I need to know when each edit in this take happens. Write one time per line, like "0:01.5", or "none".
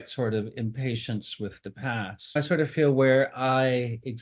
0:02.4